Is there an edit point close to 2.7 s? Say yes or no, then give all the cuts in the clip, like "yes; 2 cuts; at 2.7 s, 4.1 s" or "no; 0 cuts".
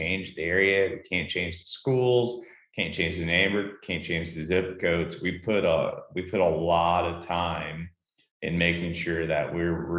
no; 0 cuts